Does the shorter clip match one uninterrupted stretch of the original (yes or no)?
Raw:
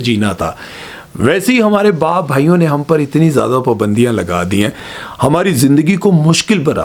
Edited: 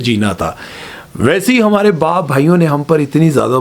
yes